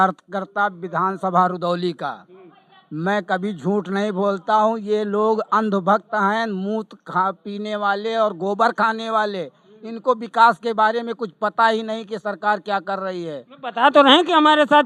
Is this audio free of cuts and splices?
yes; 0 cuts

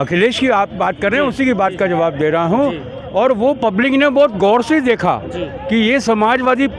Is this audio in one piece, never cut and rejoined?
yes; 0 cuts

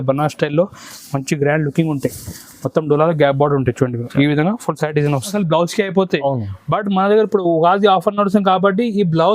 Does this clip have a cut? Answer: yes; 1 cut; at 5.3 s

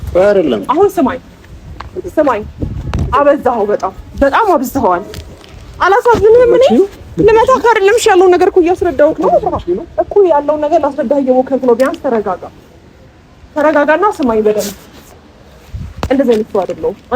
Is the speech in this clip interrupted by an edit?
yes; 1 cut; at 15.2 s

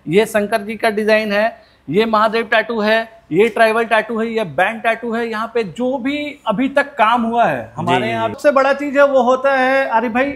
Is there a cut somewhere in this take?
yes; 1 cut; at 8.4 s

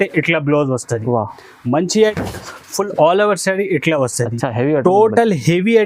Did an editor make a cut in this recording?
yes; 1 cut; at 2.1 s

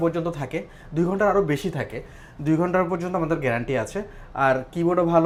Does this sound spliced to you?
no; 0 cuts

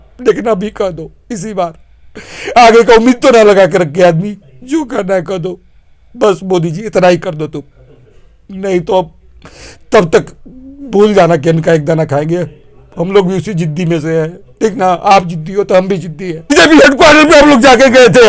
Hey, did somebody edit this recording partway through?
yes; 1 cut; at 16.5 s

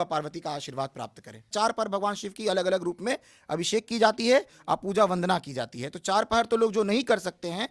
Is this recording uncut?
no; 1 cut; at 1.5 s

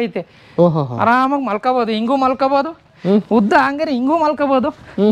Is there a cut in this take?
no; 0 cuts

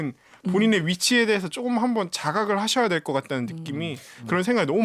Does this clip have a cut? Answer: no; 0 cuts

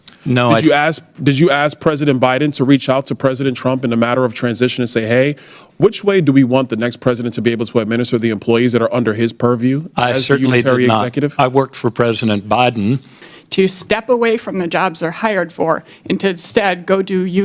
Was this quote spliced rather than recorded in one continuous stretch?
yes; 1 cut; at 13.2 s

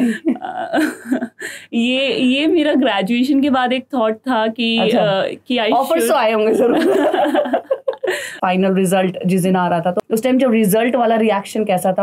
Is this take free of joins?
no; 2 cuts; at 8.4 s, 10.0 s

